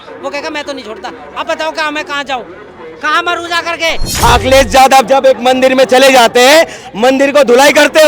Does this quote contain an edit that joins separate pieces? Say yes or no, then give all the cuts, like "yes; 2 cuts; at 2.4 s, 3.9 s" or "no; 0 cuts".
yes; 1 cut; at 4.1 s